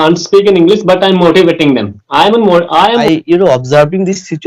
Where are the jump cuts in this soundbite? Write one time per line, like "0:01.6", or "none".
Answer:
0:03.0

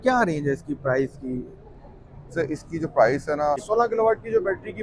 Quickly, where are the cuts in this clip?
0:03.6

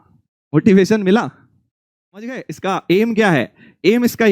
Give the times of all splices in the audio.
0:02.4

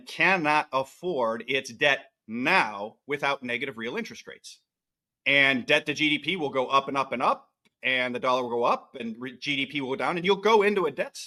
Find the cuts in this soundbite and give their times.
none

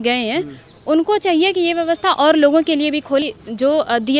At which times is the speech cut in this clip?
0:03.2

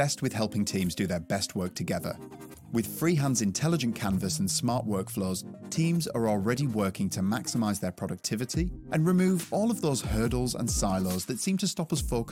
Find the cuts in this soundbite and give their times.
none

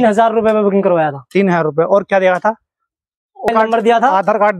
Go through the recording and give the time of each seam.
0:03.5

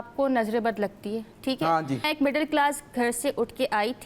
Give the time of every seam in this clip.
0:02.1

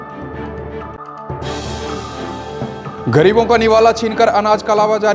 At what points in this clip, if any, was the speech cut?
0:02.9

